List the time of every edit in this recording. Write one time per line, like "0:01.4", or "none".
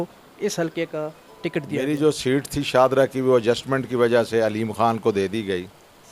0:01.8